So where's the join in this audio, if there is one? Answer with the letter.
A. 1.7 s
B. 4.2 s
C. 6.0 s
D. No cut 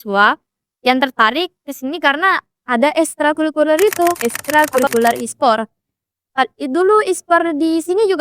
B